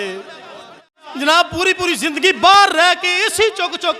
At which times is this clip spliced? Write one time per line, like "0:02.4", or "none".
0:01.0